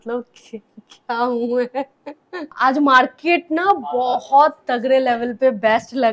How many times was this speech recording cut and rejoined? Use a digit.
0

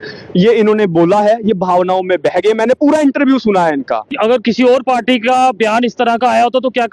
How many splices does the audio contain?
1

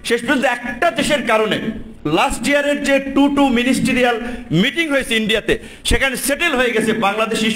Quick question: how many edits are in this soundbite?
0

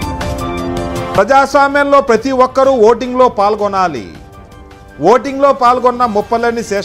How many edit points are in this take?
1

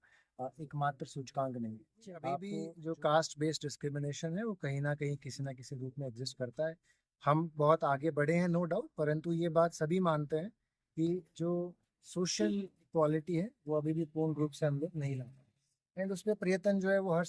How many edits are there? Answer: 1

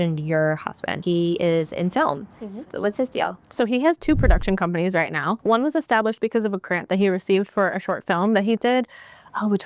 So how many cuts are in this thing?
3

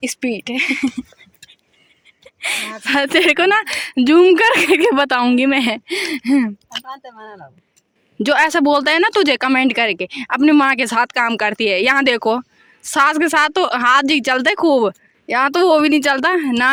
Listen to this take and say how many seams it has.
0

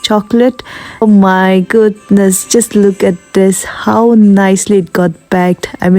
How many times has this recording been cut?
1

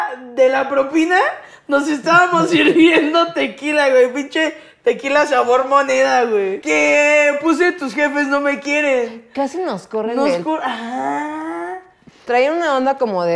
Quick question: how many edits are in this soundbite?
1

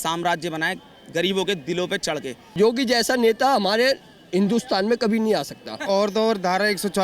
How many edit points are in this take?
2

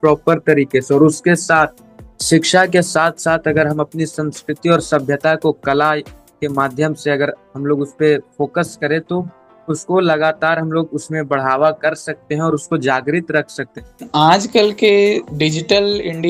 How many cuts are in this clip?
1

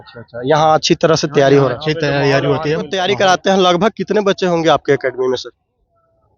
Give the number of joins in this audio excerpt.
1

